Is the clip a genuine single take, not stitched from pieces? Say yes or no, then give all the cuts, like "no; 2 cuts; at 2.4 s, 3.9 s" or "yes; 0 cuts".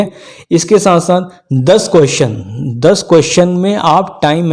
yes; 0 cuts